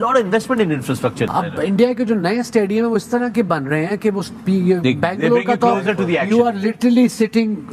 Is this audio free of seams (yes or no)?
no